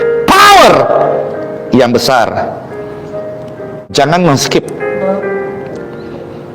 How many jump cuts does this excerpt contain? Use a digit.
1